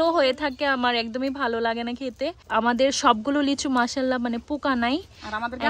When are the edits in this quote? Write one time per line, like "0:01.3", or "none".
0:02.4